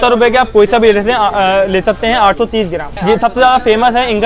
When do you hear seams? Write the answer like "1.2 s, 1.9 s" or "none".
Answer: 2.9 s